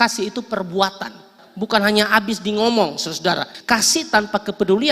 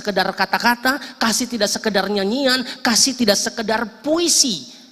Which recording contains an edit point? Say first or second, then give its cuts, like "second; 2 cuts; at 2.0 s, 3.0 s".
first; 2 cuts; at 1.4 s, 3.5 s